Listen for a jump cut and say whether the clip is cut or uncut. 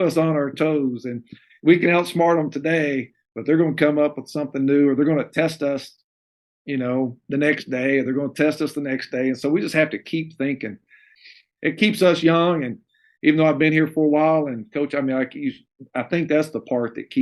cut